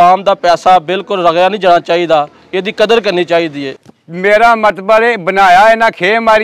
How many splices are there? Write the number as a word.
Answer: one